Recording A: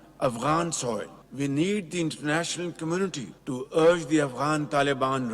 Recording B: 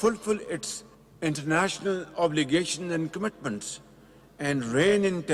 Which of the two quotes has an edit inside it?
A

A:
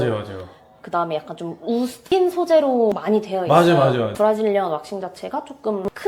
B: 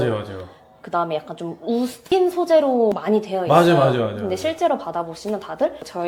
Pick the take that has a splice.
A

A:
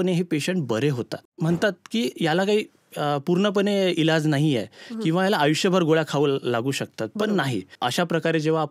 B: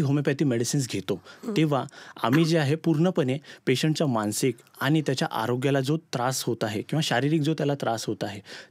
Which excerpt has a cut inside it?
A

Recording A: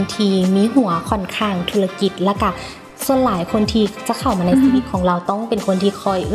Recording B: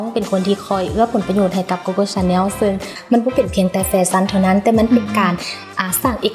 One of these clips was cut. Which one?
B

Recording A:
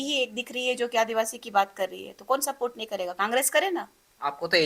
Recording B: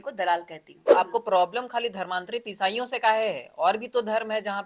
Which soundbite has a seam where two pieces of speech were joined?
B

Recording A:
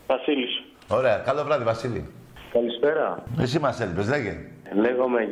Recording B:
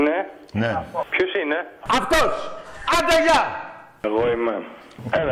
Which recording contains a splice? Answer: A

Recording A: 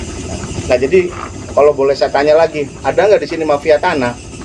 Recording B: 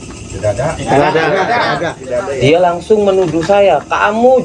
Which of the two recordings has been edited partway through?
B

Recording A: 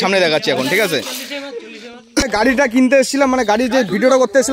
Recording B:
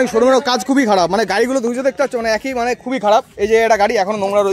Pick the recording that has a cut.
A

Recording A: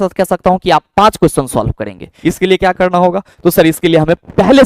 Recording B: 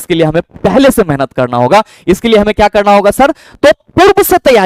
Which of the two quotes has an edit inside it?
A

